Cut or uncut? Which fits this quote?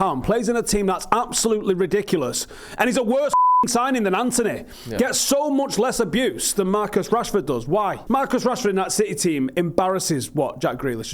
cut